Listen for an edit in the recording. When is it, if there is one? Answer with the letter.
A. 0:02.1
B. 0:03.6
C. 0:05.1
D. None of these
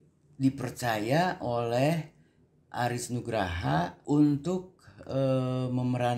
D